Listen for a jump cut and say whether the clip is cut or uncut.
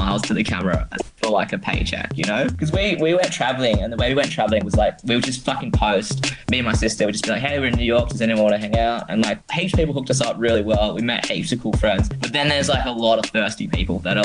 cut